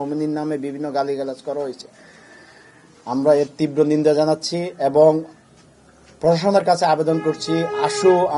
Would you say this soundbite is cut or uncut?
uncut